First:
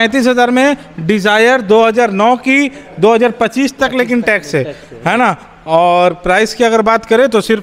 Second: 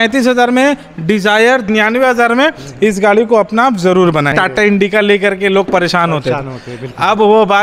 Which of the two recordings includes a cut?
second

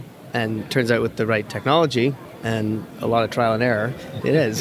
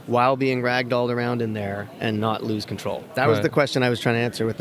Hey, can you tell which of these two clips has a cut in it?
first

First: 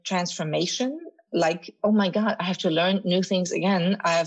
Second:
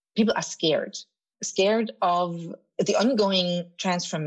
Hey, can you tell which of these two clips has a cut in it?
second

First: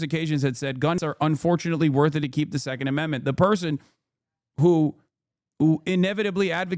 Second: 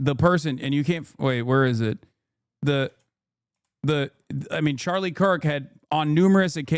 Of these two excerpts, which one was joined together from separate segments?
first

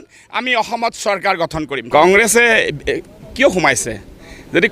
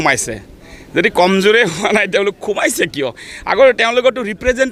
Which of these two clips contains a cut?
first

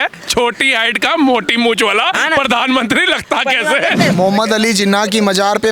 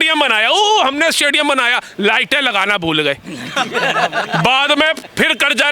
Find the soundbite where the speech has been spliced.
first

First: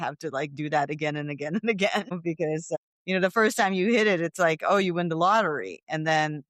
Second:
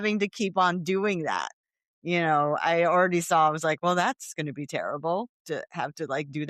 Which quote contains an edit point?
first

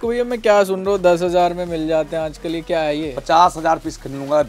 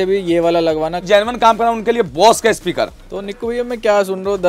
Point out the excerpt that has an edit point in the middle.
second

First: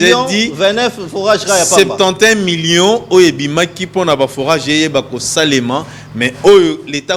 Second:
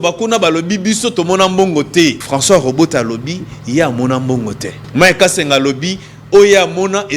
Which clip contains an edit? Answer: second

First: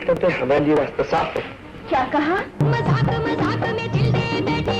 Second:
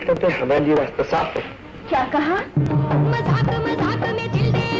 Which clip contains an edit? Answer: first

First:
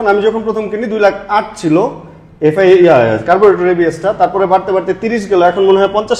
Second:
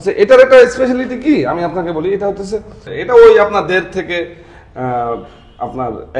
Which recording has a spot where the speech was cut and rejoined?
second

